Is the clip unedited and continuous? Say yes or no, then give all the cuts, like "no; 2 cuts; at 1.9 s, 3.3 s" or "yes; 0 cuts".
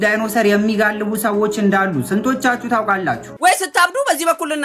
no; 1 cut; at 3.3 s